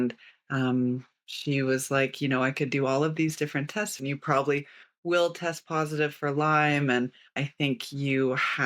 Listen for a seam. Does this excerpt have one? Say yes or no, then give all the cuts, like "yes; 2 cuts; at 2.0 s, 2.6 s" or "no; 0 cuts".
yes; 2 cuts; at 4.0 s, 7.4 s